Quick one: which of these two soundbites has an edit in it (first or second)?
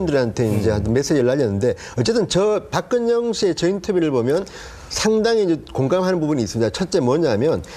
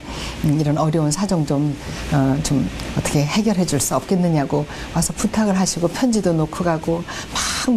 first